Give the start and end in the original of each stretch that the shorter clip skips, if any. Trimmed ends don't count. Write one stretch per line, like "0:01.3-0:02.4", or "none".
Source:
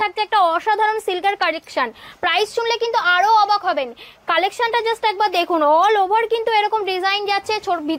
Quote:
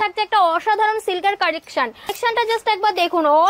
0:02.2-0:04.5